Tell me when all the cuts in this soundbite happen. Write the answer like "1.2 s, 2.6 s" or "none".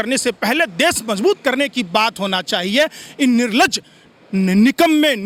none